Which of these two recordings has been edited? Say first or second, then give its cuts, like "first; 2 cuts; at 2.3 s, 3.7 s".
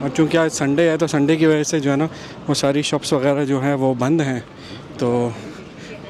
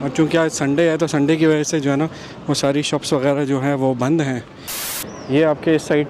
second; 1 cut; at 4.9 s